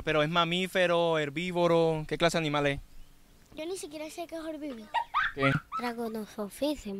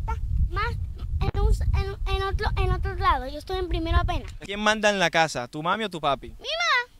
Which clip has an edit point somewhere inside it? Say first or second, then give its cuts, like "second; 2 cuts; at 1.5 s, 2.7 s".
second; 1 cut; at 4.3 s